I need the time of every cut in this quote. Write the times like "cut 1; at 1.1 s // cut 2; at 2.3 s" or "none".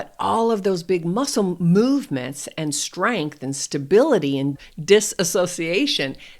cut 1; at 4.5 s